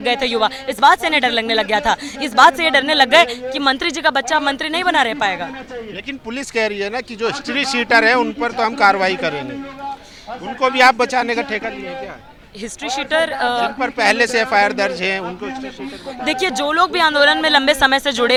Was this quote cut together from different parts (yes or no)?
no